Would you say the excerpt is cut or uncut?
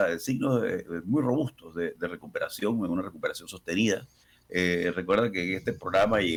uncut